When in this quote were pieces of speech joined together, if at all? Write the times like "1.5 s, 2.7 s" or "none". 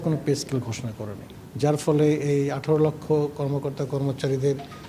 none